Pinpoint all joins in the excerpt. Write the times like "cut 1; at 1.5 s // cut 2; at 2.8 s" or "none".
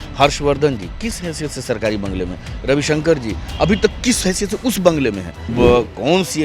cut 1; at 5.5 s